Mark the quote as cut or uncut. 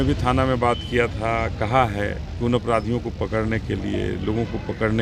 uncut